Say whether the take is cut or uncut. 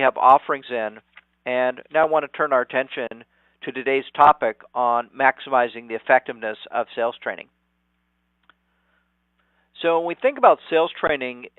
cut